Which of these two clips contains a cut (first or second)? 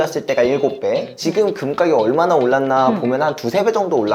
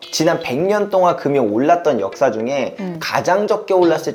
first